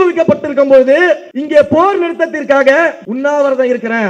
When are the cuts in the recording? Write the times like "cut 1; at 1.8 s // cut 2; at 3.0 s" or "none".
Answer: cut 1; at 1.3 s // cut 2; at 3.1 s

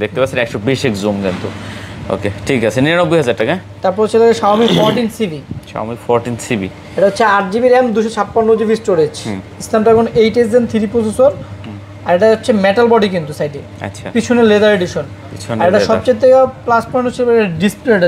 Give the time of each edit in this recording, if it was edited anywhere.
none

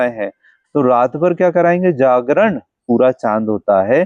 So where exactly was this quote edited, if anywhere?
cut 1; at 2.8 s

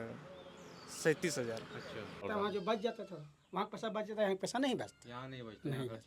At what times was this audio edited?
cut 1; at 2.2 s

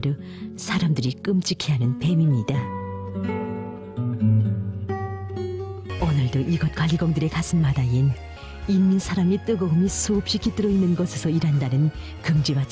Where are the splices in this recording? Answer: cut 1; at 5.9 s // cut 2; at 8.5 s

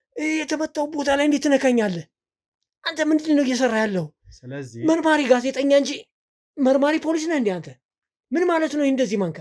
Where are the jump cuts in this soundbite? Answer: none

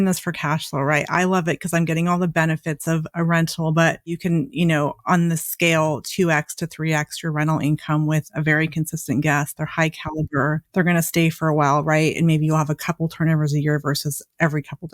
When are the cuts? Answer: cut 1; at 4.2 s // cut 2; at 10.6 s

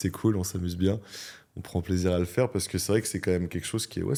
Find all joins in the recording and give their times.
none

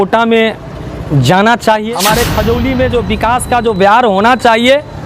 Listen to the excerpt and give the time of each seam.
cut 1; at 1.8 s

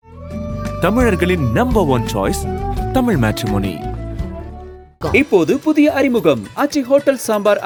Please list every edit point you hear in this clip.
none

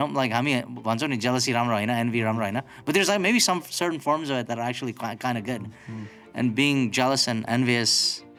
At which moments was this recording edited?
none

